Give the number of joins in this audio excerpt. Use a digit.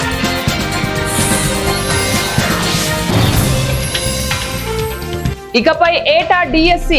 1